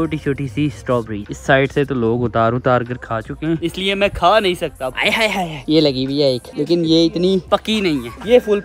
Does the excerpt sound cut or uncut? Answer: cut